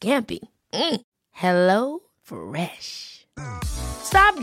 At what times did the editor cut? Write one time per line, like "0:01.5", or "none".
none